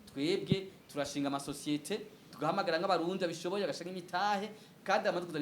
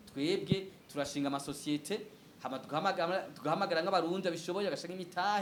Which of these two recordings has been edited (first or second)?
first